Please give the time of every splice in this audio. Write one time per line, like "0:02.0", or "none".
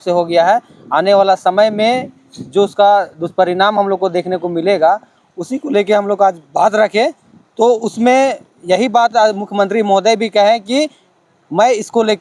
none